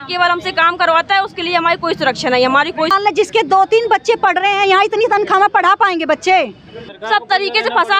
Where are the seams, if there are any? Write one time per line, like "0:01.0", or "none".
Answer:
0:02.9
0:07.0